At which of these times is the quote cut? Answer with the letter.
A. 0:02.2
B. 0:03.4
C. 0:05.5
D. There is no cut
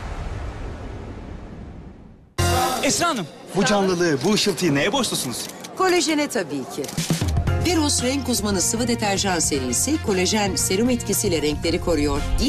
A